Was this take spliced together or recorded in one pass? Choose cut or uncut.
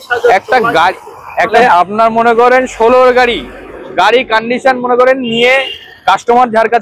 cut